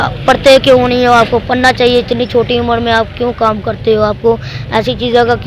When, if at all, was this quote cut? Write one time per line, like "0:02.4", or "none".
none